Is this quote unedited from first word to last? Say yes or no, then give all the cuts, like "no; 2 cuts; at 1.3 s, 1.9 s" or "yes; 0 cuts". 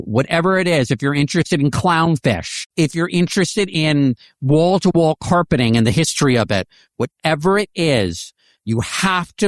no; 1 cut; at 2.5 s